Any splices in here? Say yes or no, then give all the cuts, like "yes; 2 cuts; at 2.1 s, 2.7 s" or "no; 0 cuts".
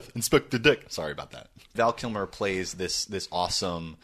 yes; 1 cut; at 1.7 s